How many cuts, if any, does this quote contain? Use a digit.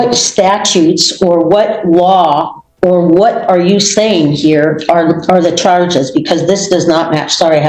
0